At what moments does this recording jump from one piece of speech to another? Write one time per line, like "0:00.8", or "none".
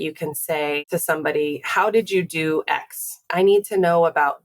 0:00.8
0:03.3